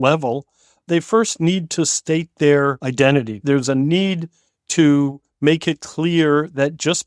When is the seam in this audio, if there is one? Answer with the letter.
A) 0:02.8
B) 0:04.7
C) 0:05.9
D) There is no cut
A